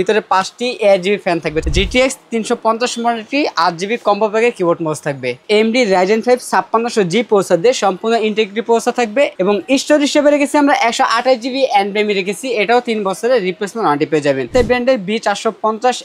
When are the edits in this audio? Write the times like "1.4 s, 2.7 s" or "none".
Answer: 1.6 s, 5.4 s, 9.4 s, 14.5 s